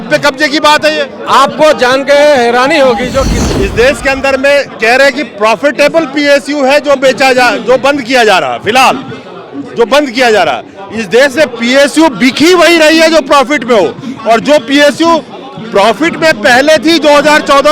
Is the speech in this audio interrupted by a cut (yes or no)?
yes